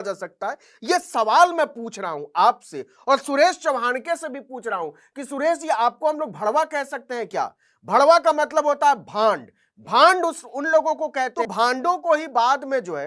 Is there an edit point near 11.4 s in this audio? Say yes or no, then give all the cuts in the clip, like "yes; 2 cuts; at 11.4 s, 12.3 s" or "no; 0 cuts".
yes; 1 cut; at 11.4 s